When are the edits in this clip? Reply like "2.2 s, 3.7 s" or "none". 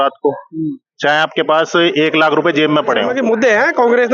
3.1 s